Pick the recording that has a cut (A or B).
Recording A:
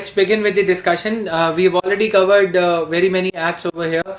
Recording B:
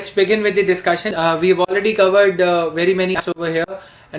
B